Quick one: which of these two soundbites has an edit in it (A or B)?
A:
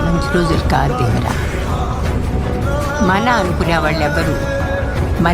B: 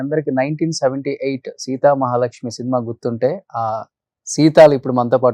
A